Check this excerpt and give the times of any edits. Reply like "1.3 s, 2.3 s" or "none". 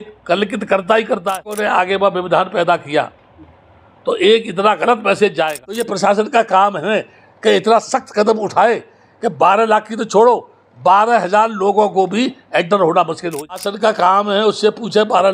1.5 s, 5.7 s, 13.5 s